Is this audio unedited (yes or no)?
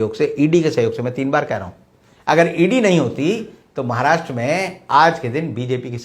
yes